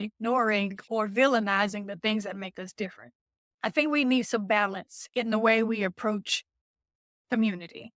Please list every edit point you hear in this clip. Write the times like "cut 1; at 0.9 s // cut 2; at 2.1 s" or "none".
cut 1; at 3.5 s